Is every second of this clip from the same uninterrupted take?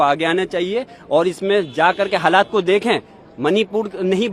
yes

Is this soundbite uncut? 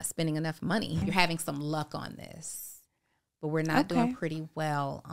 no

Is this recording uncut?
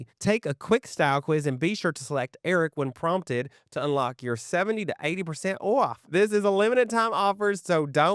yes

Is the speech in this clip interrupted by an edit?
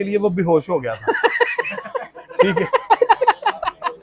no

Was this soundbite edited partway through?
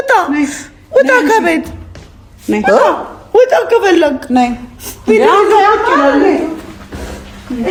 no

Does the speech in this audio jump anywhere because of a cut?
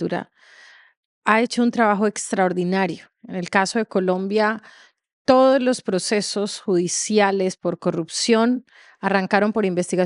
no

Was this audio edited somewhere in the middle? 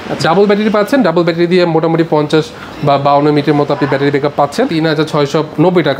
yes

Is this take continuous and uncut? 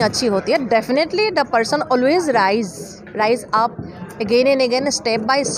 yes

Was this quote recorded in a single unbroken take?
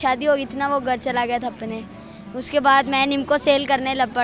yes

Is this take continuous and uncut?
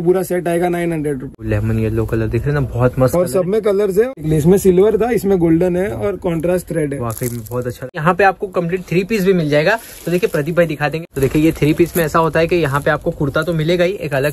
no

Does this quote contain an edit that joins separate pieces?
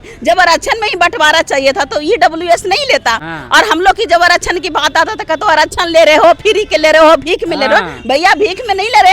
yes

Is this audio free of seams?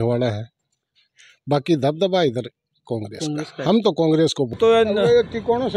no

